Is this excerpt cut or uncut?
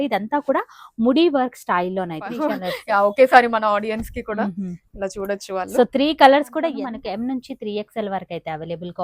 cut